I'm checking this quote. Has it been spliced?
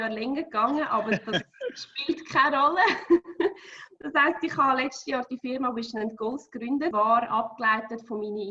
yes; 1 cut; at 6.9 s

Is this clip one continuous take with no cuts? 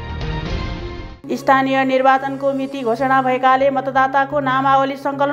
yes; 0 cuts

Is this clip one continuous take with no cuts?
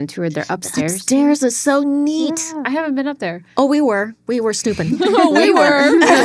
yes; 0 cuts

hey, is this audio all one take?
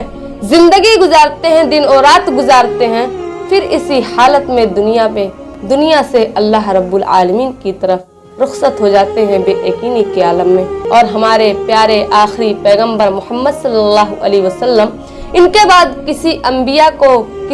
no; 1 cut; at 10.8 s

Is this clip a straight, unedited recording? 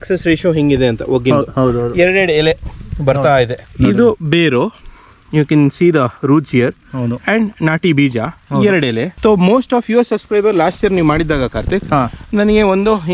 no; 2 cuts; at 3.6 s, 9.1 s

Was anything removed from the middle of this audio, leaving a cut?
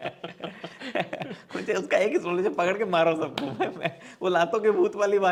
no; 0 cuts

